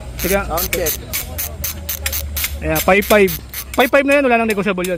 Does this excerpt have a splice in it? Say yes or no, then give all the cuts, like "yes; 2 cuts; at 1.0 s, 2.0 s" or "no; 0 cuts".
no; 0 cuts